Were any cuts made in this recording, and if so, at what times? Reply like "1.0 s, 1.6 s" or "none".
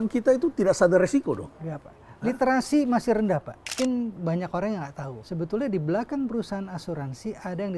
3.7 s, 5.2 s